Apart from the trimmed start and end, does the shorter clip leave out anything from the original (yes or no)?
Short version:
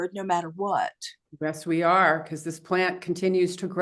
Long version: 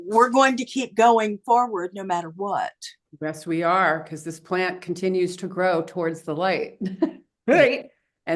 no